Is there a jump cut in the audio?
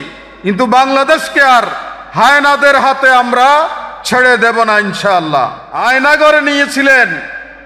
yes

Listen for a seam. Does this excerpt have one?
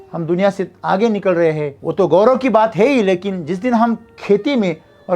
yes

